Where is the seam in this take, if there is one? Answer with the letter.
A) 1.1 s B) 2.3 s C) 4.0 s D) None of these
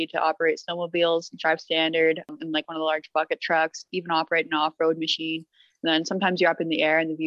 B